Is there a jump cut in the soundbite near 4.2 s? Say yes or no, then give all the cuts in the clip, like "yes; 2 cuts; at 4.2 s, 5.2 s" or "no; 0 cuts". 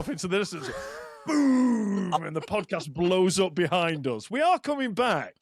no; 0 cuts